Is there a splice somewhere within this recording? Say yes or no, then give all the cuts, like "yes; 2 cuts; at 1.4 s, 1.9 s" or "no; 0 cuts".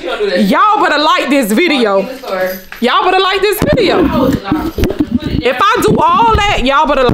no; 0 cuts